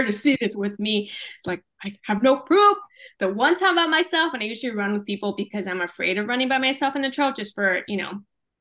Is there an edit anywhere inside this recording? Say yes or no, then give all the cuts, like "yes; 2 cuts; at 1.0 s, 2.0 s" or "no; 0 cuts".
no; 0 cuts